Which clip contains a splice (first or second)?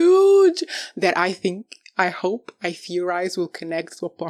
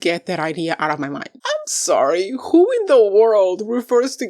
second